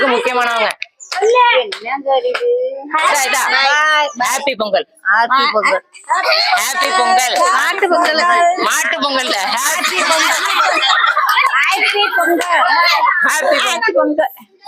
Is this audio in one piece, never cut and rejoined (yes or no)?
no